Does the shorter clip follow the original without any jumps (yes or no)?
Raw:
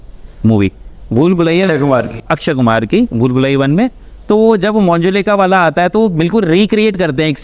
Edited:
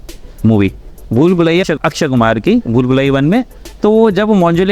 no